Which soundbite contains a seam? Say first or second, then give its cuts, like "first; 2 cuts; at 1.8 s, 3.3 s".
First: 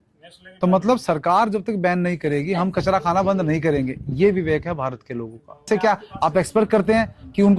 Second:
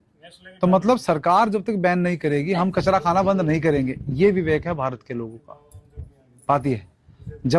first; 1 cut; at 5.7 s